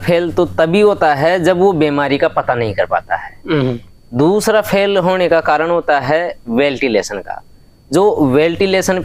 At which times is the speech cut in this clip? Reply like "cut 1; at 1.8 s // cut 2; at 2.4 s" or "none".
none